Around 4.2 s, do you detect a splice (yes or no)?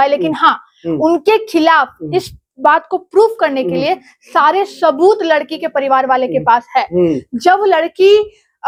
no